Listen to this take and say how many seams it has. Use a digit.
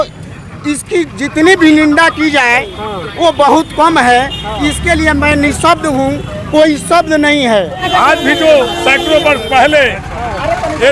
1